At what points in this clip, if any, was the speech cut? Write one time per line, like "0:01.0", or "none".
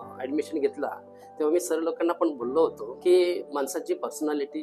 0:02.9
0:03.5